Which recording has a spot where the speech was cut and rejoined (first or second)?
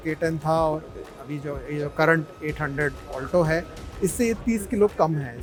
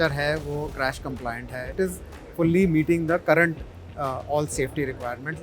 second